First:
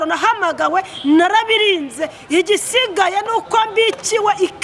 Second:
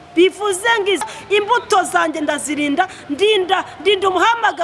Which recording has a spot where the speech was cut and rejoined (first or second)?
second